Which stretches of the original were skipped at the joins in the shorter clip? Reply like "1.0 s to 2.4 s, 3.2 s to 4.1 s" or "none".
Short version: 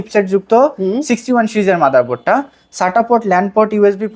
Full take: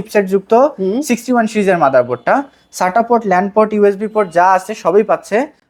none